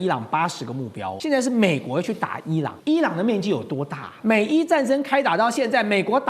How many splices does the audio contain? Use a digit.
3